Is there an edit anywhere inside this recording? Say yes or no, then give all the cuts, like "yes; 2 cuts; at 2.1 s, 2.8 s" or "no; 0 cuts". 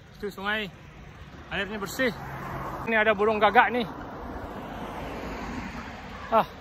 yes; 1 cut; at 2.9 s